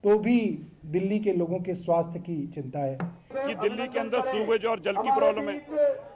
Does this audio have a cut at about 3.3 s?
yes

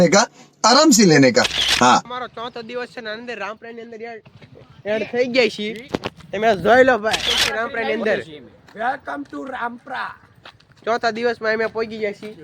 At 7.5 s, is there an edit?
yes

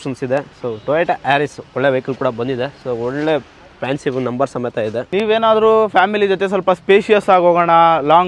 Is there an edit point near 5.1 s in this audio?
yes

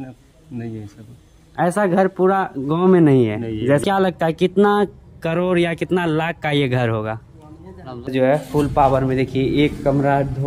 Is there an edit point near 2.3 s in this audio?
no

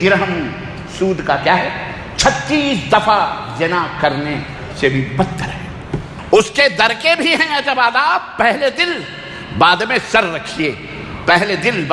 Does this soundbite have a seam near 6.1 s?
yes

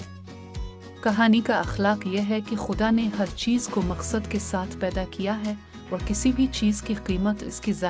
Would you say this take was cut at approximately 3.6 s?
no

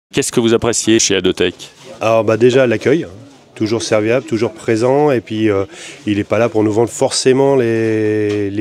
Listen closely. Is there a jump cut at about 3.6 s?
no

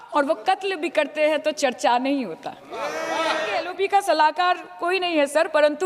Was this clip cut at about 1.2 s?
no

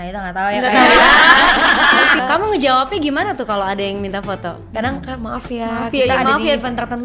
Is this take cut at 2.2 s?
yes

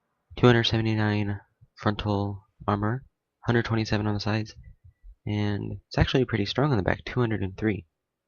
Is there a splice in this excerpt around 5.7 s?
yes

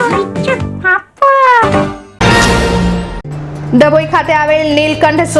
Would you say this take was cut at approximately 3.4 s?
no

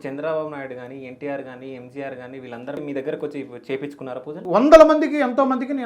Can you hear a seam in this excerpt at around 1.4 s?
no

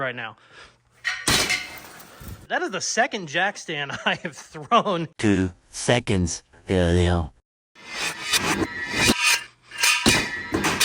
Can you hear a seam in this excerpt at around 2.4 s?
yes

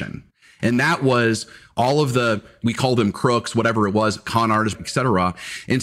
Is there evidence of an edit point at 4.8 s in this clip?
no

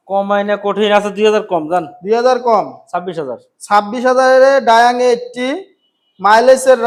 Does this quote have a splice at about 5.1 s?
no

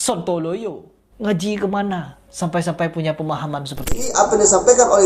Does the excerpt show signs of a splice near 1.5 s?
no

